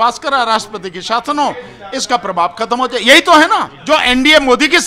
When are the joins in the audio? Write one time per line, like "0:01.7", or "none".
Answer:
0:03.7